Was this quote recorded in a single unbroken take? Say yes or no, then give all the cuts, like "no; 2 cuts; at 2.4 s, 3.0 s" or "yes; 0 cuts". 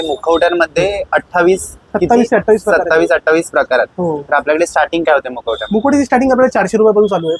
yes; 0 cuts